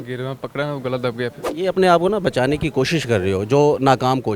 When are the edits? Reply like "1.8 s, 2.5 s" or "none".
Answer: 1.4 s